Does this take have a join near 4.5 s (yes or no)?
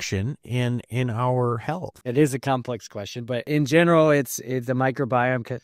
no